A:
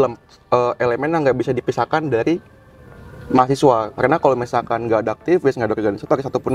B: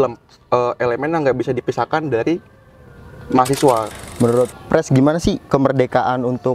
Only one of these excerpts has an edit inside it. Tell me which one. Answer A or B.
B